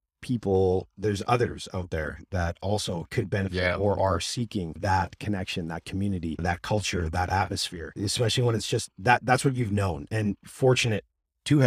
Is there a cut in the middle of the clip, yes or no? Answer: no